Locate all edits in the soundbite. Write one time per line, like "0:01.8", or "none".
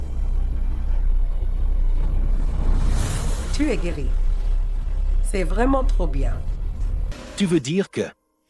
0:07.1